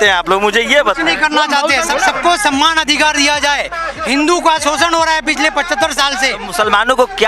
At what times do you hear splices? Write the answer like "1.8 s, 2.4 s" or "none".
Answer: 1.9 s